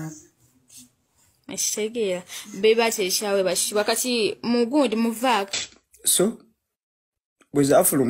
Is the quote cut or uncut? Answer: cut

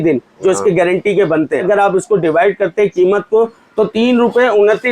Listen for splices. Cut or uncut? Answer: cut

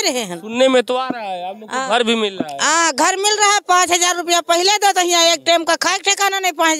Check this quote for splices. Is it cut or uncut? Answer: uncut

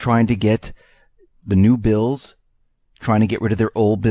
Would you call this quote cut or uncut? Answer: cut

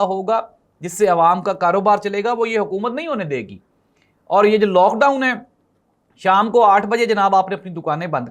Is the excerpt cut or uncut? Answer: uncut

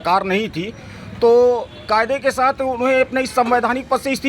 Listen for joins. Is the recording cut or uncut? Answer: uncut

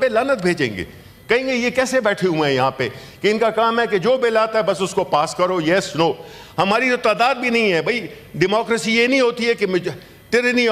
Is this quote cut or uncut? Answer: uncut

